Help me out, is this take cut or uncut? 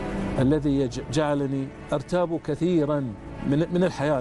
cut